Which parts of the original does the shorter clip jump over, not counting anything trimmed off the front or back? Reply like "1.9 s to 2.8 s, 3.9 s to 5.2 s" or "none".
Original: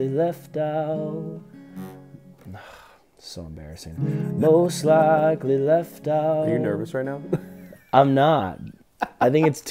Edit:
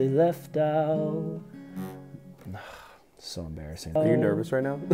4.0 s to 6.4 s